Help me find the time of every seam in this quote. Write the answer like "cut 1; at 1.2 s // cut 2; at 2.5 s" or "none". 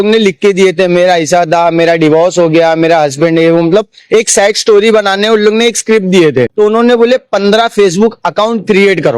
cut 1; at 6.5 s